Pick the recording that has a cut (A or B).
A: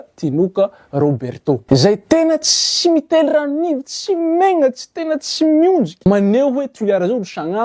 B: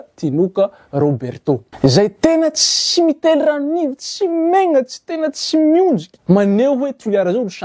A